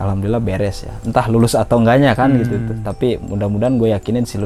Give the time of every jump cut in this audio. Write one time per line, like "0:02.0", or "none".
none

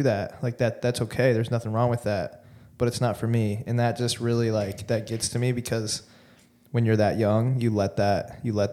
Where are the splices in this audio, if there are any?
none

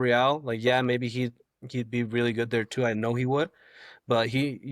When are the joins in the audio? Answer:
none

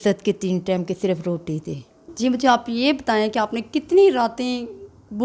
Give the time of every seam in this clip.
0:02.0

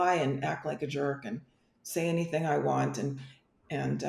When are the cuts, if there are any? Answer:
none

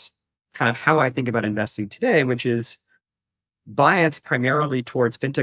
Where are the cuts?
none

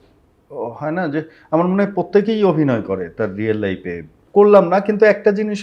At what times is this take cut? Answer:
0:04.1

